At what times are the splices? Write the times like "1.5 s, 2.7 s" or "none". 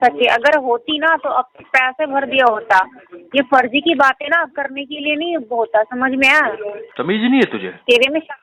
6.8 s